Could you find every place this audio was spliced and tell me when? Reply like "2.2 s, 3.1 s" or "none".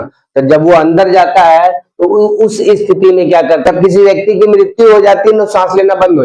3.6 s